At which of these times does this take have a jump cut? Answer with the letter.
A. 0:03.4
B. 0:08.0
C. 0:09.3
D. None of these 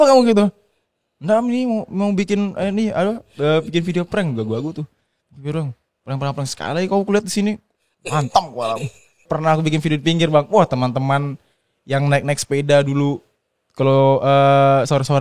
C